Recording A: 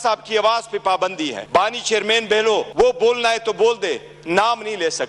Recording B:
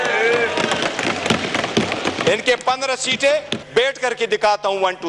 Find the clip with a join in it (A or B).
A